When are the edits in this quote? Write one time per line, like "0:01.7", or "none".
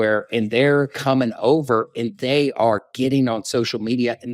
0:01.0